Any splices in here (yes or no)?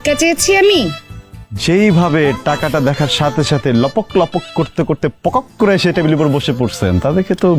no